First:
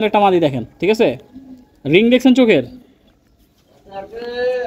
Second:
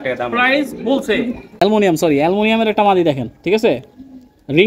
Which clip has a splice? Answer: second; 1 cut; at 1.4 s

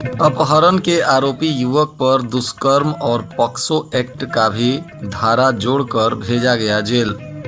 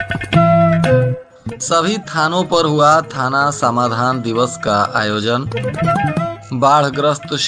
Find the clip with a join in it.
second; 1 cut; at 1.2 s

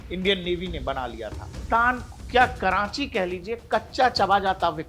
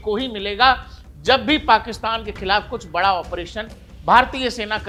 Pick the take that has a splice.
first; 1 cut; at 1.5 s

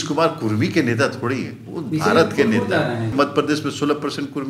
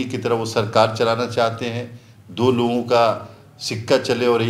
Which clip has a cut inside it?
first; 1 cut; at 3.1 s

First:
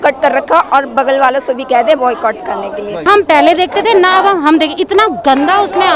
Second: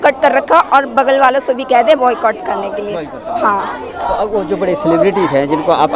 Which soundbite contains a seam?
first; 1 cut; at 3.1 s

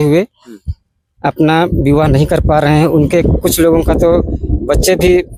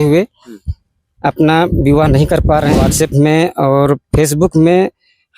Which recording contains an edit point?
second; 1 cut; at 2.8 s

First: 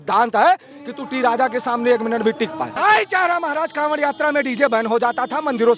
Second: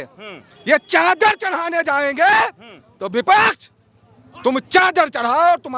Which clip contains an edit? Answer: first; 1 cut; at 2.7 s

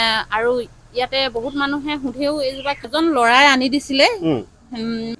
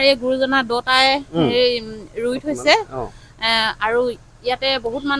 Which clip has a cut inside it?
first; 1 cut; at 2.9 s

